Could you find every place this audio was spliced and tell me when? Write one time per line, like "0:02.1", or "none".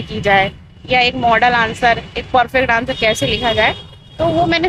none